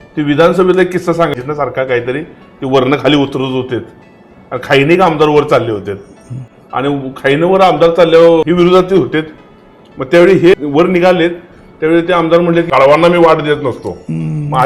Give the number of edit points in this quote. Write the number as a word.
four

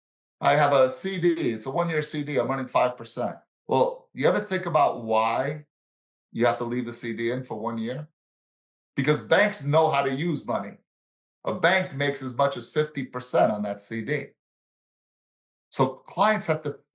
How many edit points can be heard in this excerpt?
zero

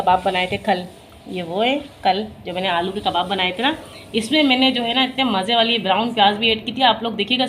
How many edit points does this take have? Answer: zero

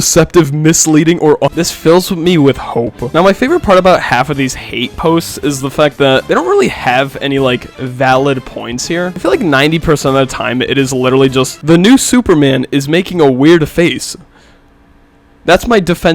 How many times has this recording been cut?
one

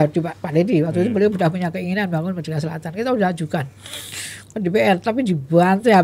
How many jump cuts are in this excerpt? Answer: zero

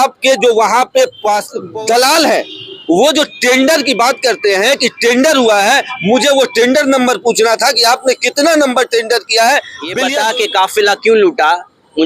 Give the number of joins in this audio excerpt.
two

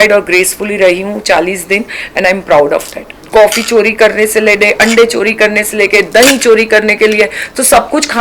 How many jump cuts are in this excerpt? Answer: one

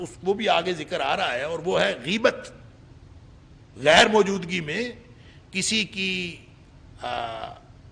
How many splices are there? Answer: zero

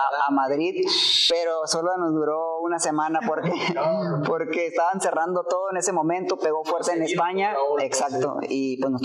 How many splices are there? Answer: zero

